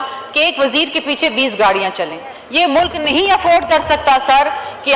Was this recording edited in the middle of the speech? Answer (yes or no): no